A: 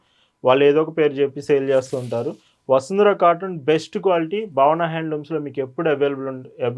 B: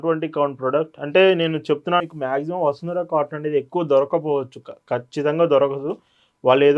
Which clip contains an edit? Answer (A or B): B